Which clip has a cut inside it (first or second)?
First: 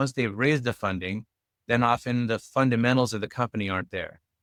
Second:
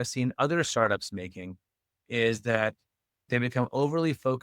second